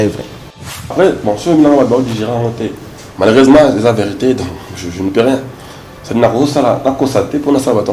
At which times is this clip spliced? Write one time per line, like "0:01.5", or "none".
0:00.9